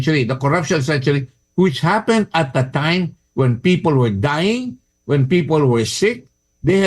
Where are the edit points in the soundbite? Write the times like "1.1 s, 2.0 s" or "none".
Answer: 1.3 s

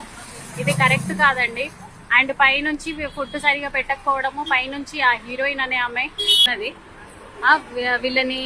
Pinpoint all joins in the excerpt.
6.5 s

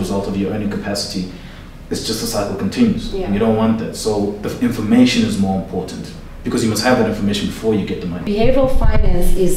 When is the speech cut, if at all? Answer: 8.3 s

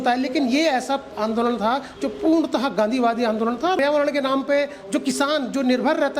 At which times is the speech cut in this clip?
3.8 s

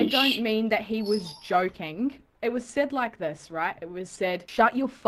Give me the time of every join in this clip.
2.3 s

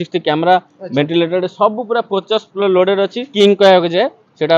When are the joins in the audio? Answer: 3.3 s

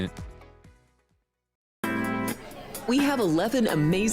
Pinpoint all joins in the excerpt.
1.2 s

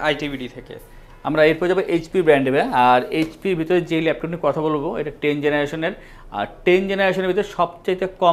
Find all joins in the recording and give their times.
none

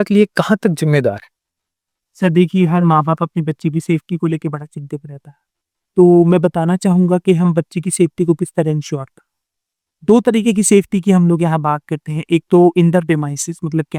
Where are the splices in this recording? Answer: none

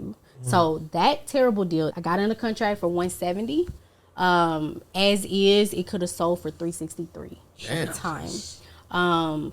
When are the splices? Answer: 1.9 s

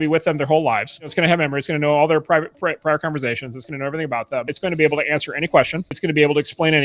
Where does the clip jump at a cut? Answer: 1.1 s, 4.5 s, 5.9 s

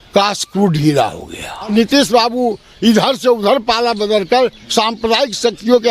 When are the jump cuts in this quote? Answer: 1.7 s

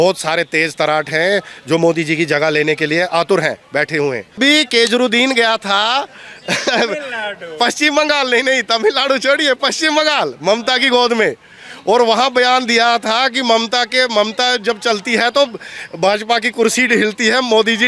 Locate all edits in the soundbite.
4.4 s

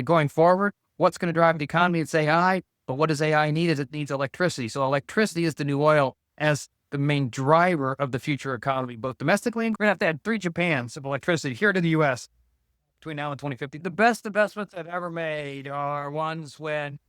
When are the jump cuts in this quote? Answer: 9.7 s, 13.8 s

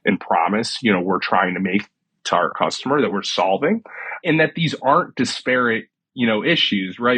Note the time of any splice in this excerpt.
2.5 s, 4.2 s

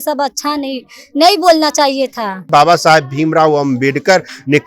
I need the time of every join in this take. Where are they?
2.5 s

